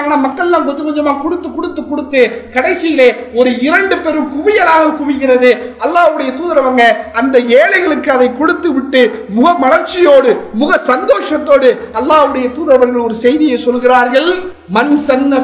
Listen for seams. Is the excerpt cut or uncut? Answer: uncut